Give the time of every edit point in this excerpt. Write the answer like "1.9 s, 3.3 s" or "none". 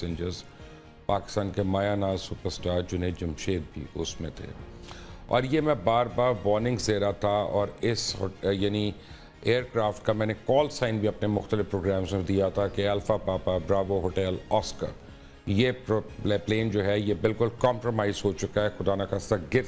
none